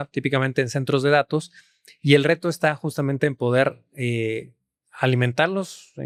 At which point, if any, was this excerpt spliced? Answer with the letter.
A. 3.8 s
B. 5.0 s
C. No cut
C